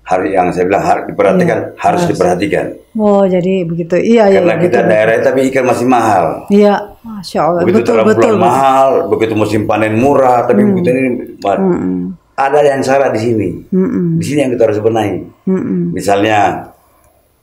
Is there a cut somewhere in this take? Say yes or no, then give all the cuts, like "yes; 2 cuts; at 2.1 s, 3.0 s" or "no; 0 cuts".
no; 0 cuts